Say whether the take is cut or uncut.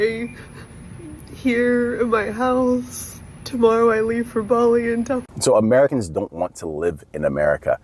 cut